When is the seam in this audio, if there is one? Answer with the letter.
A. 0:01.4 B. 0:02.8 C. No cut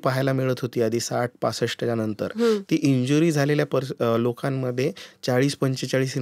C